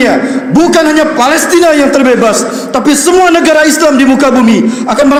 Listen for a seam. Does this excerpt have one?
no; 0 cuts

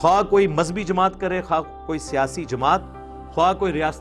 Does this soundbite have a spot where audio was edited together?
no; 0 cuts

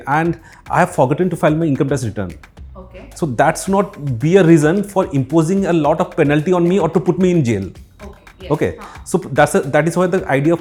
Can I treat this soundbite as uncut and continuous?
yes; 0 cuts

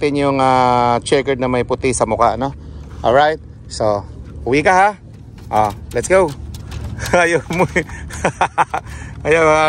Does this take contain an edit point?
no; 0 cuts

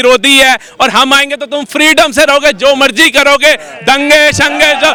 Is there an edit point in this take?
no; 0 cuts

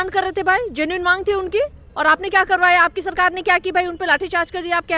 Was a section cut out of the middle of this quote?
yes; 1 cut; at 1.8 s

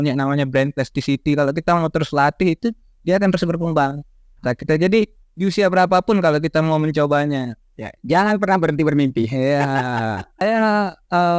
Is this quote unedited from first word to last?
no; 1 cut; at 10.4 s

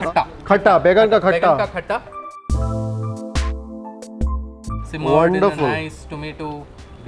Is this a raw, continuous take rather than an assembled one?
yes; 0 cuts

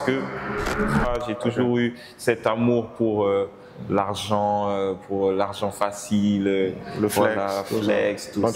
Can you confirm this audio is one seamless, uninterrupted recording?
no; 1 cut; at 1.0 s

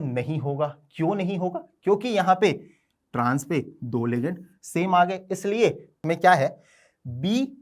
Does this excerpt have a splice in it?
yes; 1 cut; at 5.9 s

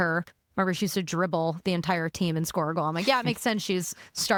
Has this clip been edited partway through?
no; 0 cuts

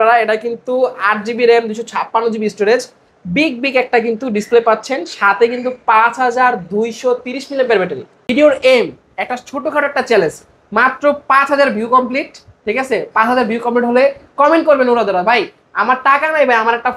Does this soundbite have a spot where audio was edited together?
yes; 1 cut; at 8.2 s

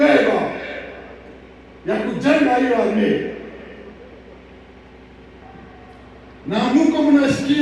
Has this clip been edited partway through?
yes; 1 cut; at 5.4 s

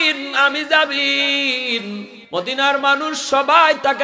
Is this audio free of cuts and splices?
no; 1 cut; at 2.1 s

